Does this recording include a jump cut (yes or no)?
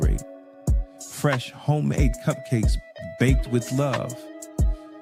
no